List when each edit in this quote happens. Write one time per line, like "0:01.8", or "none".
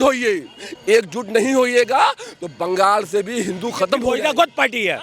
0:04.0